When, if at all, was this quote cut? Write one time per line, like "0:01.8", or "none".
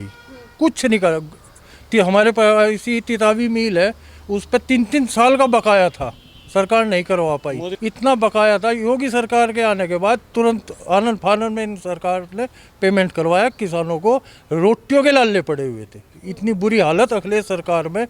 0:07.7